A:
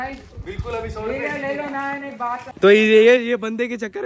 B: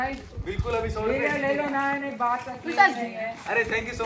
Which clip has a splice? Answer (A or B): A